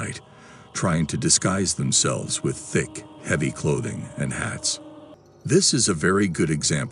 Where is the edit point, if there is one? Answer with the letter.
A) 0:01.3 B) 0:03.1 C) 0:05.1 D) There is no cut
C